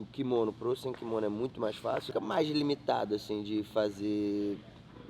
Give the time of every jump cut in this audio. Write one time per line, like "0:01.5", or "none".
0:02.1